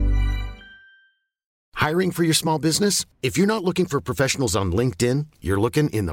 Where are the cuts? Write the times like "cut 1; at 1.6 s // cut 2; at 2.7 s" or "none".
cut 1; at 1.6 s